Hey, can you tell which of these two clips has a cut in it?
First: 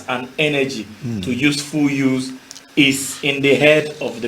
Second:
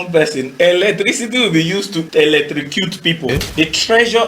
second; 2 cuts; at 2.1 s, 3.3 s

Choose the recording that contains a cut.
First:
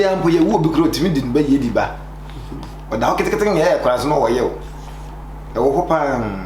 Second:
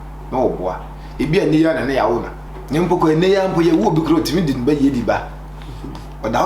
second; 1 cut; at 2.4 s

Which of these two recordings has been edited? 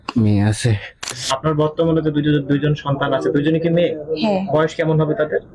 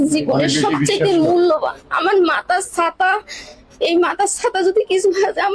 first; 1 cut; at 1.3 s

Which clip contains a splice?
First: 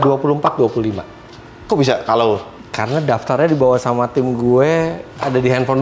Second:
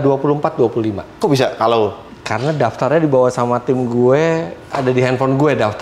second; 1 cut; at 1.1 s

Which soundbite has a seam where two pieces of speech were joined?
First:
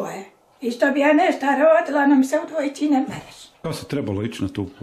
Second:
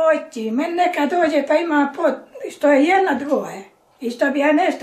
first; 1 cut; at 3.6 s

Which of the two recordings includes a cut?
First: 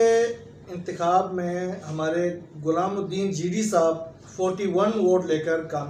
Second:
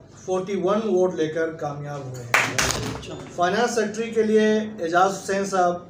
second; 1 cut; at 2.7 s

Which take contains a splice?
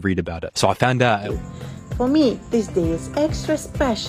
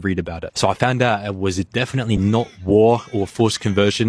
first; 1 cut; at 1.3 s

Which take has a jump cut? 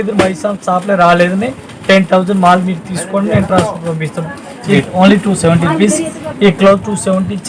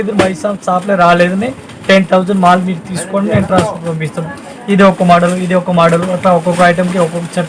first; 1 cut; at 4.8 s

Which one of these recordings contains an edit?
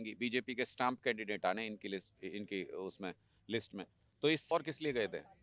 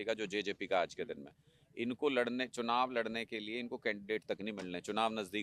first; 1 cut; at 4.4 s

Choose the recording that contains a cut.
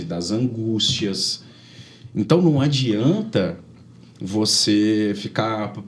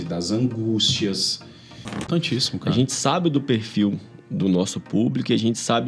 second; 1 cut; at 2.1 s

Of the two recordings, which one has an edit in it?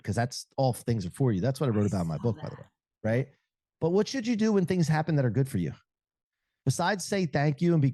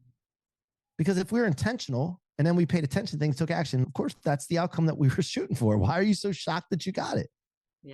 second; 1 cut; at 3.8 s

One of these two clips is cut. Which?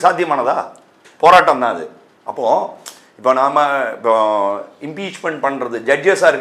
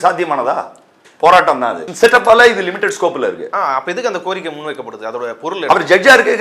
second; 1 cut; at 1.8 s

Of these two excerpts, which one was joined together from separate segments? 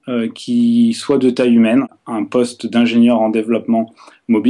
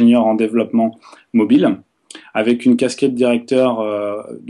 first; 1 cut; at 2.0 s

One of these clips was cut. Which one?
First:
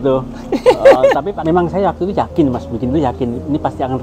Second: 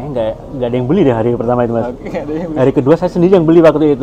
first; 1 cut; at 1.0 s

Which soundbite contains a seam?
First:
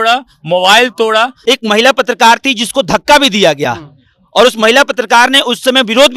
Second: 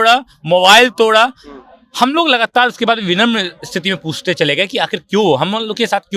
first; 1 cut; at 1.3 s

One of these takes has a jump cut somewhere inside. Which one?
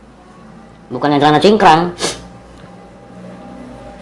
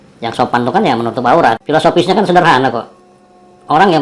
second; 1 cut; at 1.6 s

